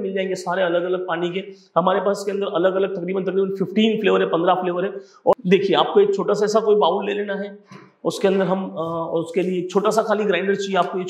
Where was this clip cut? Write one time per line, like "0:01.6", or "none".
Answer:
0:05.2